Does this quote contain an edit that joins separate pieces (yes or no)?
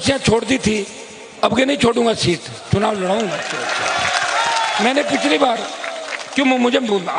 no